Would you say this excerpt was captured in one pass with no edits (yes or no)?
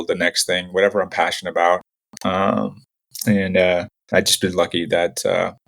no